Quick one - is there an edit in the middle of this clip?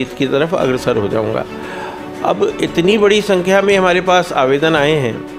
no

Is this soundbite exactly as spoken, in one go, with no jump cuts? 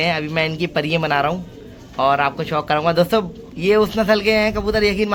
yes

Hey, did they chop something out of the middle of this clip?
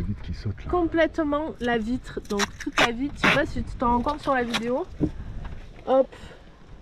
no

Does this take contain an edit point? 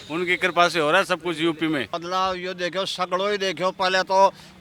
yes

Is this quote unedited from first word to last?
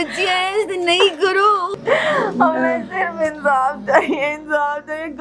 no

